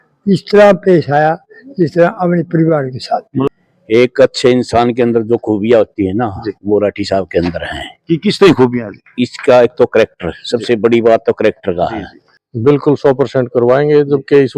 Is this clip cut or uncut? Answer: cut